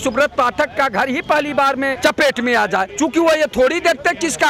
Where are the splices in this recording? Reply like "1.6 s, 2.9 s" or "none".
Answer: none